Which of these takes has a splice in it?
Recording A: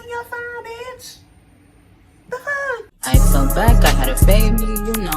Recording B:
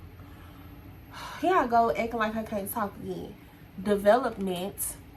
A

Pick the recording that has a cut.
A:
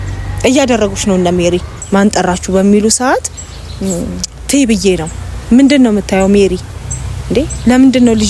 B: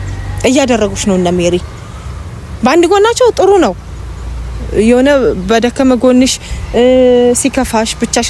A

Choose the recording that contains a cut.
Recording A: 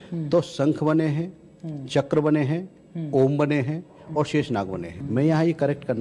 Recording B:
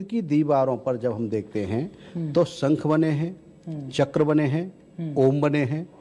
A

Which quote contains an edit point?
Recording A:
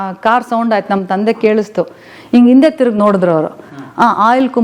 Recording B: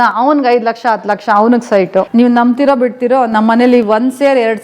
B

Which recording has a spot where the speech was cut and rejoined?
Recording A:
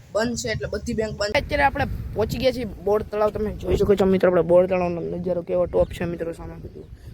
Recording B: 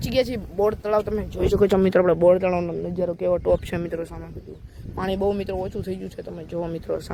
A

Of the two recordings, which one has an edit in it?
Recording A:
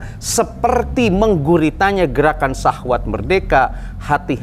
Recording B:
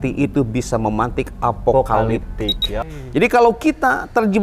B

